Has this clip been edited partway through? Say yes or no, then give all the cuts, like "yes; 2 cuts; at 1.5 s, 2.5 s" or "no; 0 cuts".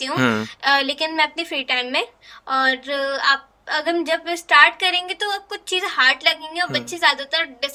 no; 0 cuts